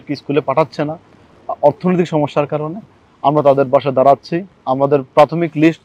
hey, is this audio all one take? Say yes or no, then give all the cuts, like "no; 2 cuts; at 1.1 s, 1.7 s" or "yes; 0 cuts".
yes; 0 cuts